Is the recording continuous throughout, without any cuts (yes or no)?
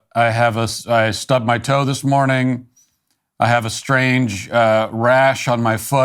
yes